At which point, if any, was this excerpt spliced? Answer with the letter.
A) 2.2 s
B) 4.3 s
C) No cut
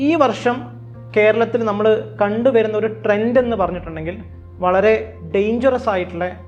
C